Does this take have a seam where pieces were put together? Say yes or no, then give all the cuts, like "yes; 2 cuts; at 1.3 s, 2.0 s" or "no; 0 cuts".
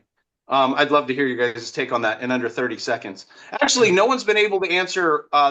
no; 0 cuts